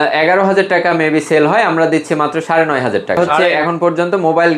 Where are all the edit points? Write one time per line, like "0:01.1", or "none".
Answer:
0:03.3